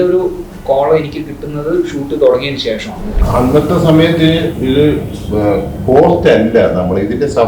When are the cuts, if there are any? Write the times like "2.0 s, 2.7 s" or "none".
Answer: 3.0 s